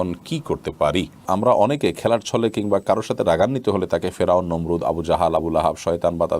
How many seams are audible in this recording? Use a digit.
1